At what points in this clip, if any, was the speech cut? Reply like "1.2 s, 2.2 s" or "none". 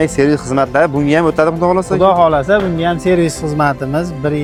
none